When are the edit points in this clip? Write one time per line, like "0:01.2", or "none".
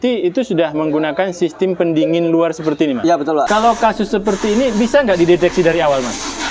0:03.5